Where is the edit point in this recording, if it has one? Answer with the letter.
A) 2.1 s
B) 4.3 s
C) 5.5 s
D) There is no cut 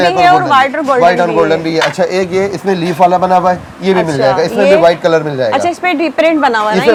D